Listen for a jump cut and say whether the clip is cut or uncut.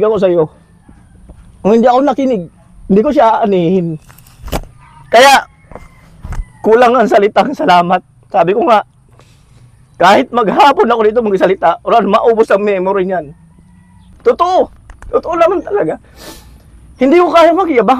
cut